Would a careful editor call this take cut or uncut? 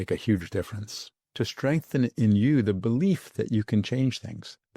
cut